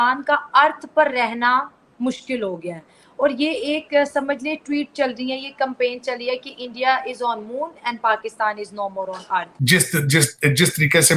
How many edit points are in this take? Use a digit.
1